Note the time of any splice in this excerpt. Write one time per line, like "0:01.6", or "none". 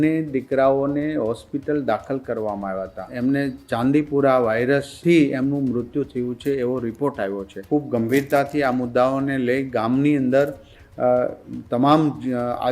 0:03.1
0:07.5